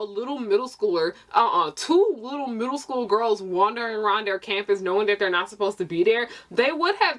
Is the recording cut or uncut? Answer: uncut